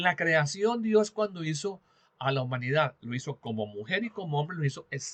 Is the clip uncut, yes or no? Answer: yes